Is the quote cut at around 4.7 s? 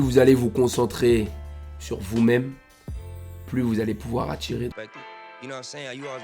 yes; 1 cut; at 4.7 s

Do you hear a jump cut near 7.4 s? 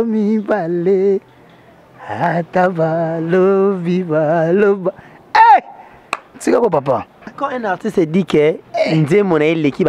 yes; 1 cut; at 7.4 s

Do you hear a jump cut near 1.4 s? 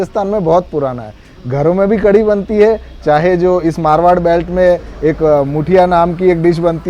no; 0 cuts

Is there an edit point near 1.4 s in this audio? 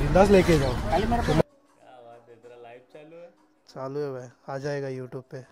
yes; 1 cut; at 1.4 s

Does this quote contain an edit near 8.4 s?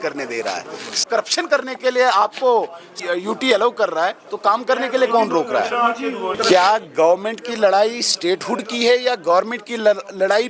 no; 3 cuts; at 1.0 s, 3.0 s, 6.4 s

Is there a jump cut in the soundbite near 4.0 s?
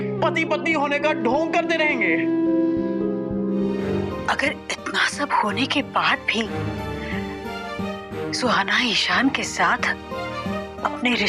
yes; 1 cut; at 4.0 s

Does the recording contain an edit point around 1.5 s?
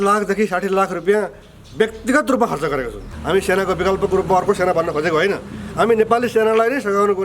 no; 1 cut; at 3.0 s

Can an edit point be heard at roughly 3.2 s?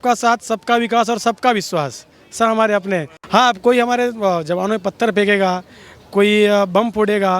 yes; 1 cut; at 3.2 s

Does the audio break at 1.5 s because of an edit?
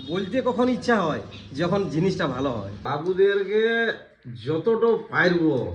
no; 1 cut; at 2.9 s

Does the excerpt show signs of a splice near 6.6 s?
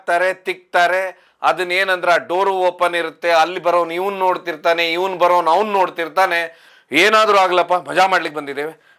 yes; 1 cut; at 6.6 s

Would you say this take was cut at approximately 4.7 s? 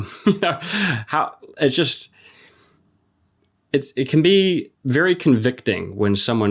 yes; 1 cut; at 4.7 s

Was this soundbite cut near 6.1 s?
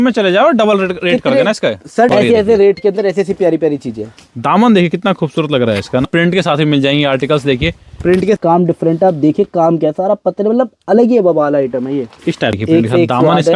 yes; 4 cuts; at 2.1 s, 6.1 s, 8.4 s, 12.6 s

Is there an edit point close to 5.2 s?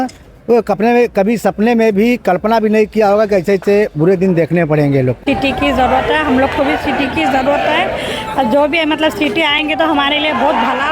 yes; 1 cut; at 5.2 s

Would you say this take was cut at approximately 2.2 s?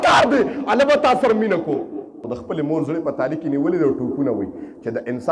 yes; 1 cut; at 2.2 s

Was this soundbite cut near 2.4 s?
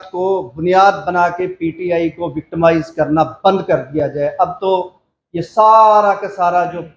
no; 0 cuts

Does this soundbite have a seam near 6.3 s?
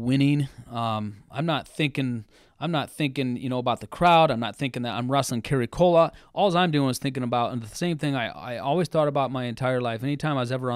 no; 0 cuts

